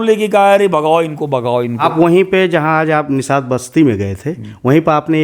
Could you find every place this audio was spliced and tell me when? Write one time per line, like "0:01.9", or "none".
0:01.8